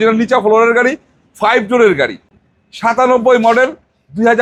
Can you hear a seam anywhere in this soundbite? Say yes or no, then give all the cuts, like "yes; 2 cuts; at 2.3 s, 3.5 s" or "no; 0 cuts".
no; 0 cuts